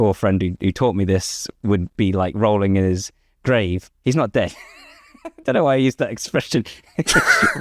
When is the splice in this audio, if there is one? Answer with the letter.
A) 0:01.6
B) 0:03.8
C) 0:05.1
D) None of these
B